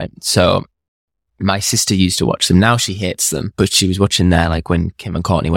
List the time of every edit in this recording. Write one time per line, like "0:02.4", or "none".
0:03.4